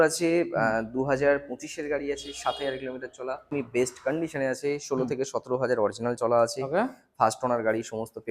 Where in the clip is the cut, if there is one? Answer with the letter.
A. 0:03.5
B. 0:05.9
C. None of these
A